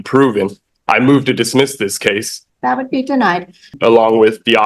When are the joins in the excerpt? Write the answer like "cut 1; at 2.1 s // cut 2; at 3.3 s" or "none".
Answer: cut 1; at 2.3 s // cut 2; at 3.7 s